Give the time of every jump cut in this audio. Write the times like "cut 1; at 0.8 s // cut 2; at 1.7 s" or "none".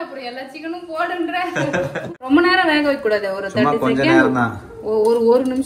cut 1; at 2.1 s